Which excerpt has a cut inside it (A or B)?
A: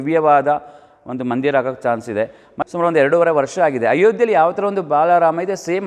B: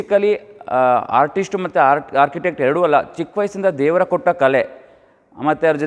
A